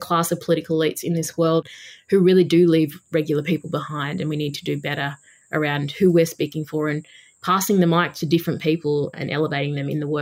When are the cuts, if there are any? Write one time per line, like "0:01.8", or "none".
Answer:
0:01.6